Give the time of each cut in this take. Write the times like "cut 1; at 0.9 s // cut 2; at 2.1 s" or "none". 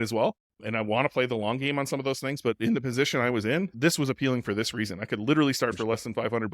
cut 1; at 3.7 s